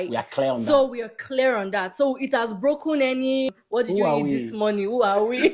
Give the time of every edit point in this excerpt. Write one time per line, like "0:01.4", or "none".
0:03.5